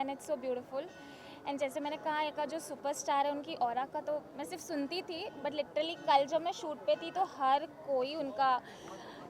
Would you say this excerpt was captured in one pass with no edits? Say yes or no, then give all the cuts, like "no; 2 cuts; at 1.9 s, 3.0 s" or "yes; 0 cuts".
yes; 0 cuts